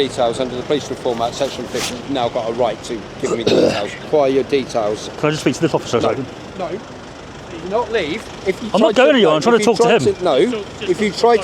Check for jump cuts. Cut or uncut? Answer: cut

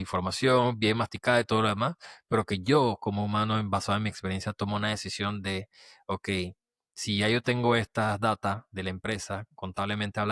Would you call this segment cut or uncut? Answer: uncut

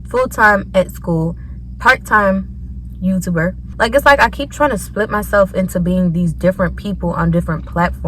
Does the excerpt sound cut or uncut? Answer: cut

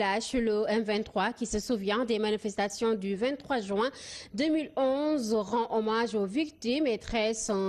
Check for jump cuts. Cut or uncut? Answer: uncut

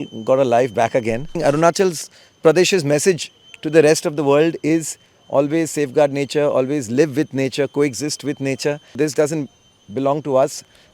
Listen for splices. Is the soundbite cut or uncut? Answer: cut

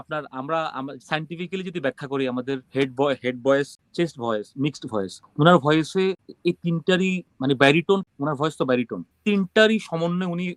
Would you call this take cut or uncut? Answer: uncut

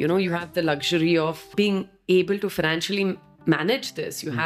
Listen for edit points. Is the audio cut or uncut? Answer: cut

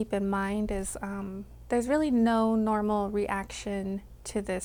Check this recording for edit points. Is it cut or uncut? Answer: uncut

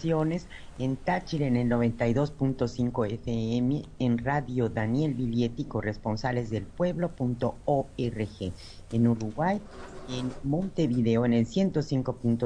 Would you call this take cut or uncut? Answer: uncut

